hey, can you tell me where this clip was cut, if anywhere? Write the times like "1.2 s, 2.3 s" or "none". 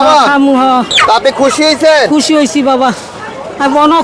0.9 s